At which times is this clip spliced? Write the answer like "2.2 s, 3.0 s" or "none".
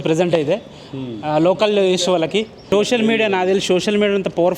2.6 s

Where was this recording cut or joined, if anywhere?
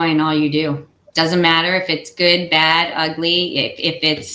1.0 s

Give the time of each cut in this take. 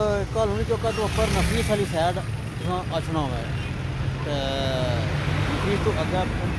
none

